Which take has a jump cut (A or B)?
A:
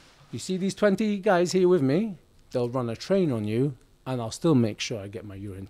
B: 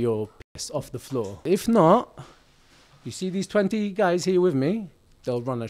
B